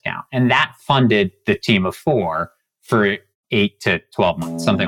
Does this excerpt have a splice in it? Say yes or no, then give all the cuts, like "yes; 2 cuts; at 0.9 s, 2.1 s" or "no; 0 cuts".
yes; 1 cut; at 3.3 s